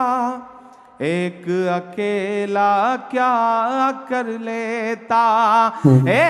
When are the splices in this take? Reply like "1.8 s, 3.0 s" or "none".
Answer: none